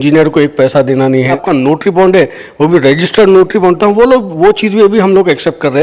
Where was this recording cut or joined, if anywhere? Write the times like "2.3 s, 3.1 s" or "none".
1.4 s